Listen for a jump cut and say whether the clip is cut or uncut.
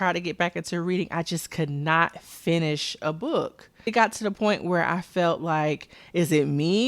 cut